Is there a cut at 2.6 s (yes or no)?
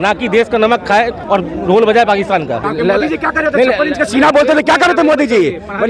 yes